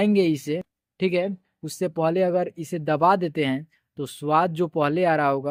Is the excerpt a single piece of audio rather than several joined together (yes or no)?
yes